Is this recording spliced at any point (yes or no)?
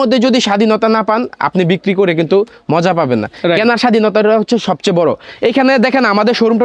no